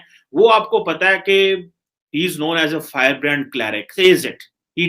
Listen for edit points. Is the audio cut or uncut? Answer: cut